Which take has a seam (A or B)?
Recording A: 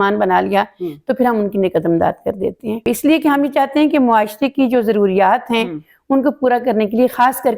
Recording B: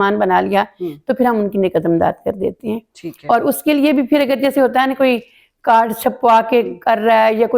A